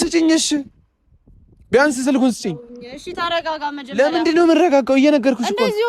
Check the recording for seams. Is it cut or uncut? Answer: uncut